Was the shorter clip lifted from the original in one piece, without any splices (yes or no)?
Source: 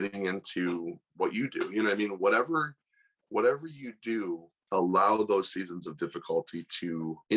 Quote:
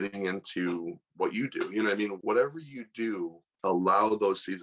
no